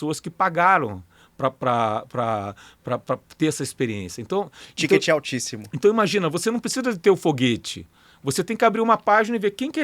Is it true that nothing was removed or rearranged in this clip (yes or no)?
yes